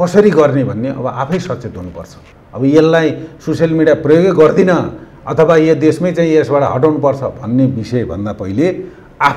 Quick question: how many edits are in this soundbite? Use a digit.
0